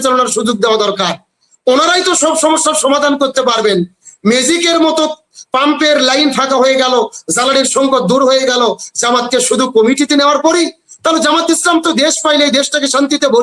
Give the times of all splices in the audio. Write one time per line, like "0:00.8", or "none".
none